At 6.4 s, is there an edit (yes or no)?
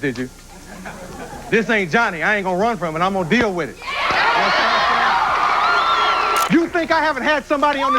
yes